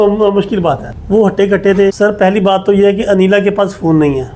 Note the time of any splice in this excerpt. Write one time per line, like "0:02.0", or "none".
0:02.0